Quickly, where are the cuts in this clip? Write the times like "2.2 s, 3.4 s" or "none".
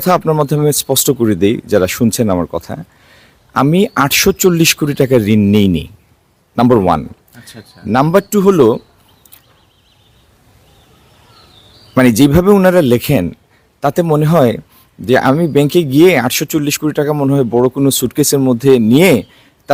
none